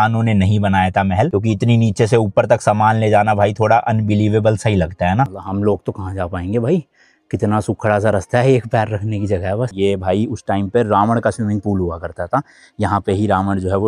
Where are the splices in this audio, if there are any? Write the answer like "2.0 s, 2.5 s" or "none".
5.3 s, 9.7 s